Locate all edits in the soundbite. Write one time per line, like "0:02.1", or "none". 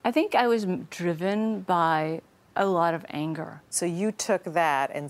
0:03.6